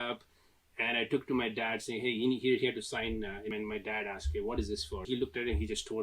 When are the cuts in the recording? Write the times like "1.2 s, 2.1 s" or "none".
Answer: 3.5 s, 5.1 s